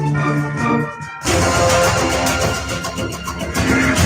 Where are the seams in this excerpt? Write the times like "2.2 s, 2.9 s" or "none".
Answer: 1.1 s